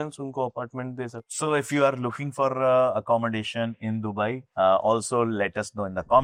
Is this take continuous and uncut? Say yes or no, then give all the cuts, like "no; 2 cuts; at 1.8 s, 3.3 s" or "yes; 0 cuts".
yes; 0 cuts